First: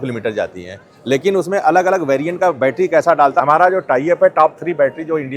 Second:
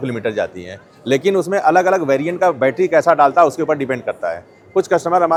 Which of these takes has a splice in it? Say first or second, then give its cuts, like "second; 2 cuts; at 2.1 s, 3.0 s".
first; 1 cut; at 3.4 s